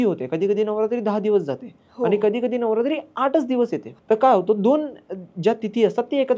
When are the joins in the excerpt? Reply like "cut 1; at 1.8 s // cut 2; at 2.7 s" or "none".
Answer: cut 1; at 3.9 s